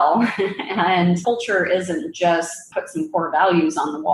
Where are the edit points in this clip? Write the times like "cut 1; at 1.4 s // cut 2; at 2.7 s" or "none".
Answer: none